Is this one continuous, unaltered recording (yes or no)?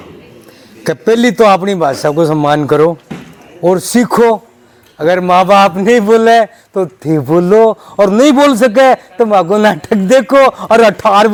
yes